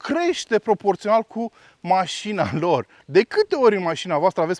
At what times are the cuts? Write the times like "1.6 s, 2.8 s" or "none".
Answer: 3.0 s